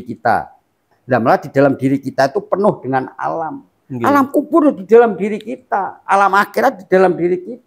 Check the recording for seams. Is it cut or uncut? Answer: cut